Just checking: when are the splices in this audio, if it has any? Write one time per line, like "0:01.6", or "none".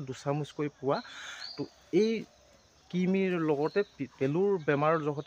0:04.0

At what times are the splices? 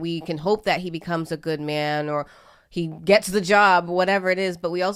none

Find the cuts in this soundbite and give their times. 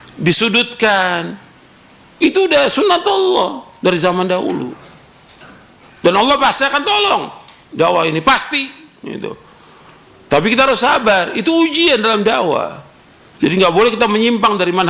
none

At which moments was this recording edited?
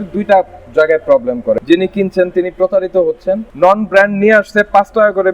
0:01.6
0:03.5

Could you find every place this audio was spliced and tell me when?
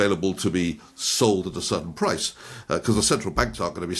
none

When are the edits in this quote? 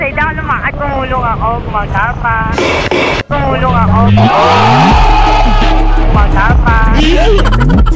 none

